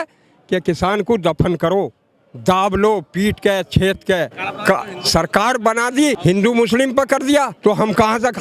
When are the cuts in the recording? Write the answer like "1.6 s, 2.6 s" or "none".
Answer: 4.4 s, 6.2 s, 7.5 s